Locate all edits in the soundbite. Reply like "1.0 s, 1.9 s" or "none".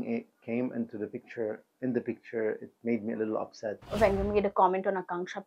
3.9 s